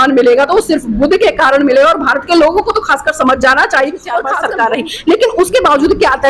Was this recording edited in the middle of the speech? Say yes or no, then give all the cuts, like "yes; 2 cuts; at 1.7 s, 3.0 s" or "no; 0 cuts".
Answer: yes; 1 cut; at 4.2 s